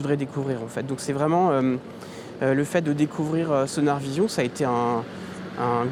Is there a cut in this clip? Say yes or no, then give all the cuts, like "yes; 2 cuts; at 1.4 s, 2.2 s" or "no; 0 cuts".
no; 0 cuts